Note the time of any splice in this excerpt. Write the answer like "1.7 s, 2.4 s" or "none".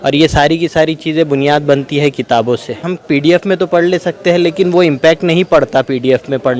2.9 s